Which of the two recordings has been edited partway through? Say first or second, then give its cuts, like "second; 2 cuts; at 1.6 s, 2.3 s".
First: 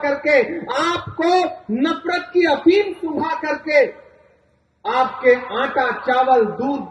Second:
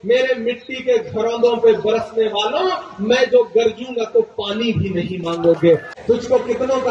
second; 1 cut; at 5.9 s